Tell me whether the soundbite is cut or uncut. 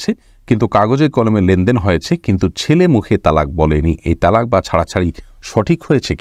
uncut